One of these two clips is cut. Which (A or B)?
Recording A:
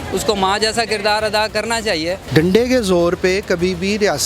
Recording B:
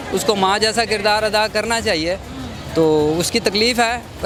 A